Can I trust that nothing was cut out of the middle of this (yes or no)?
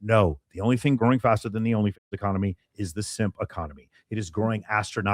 no